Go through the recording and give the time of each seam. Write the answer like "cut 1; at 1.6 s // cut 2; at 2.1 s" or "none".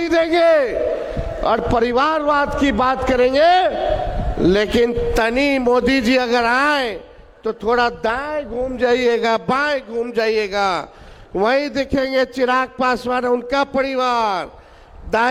none